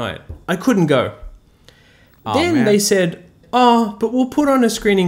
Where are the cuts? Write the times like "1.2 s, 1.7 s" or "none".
3.4 s

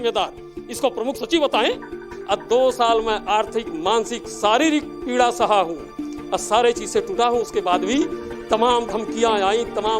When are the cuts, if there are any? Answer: 2.1 s

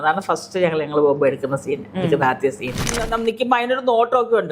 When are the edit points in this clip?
2.9 s

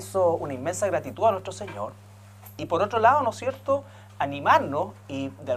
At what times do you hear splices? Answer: none

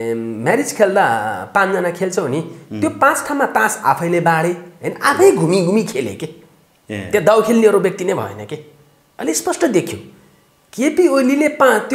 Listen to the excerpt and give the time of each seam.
none

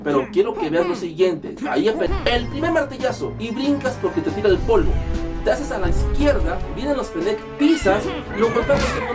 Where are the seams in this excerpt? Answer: 2.1 s

